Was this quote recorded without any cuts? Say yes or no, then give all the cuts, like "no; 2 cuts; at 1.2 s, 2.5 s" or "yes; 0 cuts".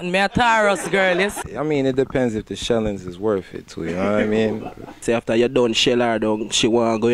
no; 2 cuts; at 1.3 s, 5.0 s